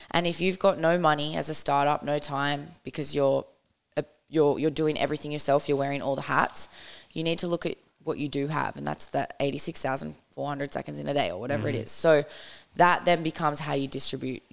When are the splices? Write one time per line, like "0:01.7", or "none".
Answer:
none